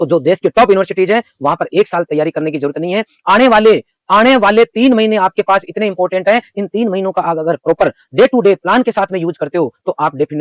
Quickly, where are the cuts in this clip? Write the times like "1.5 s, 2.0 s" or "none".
none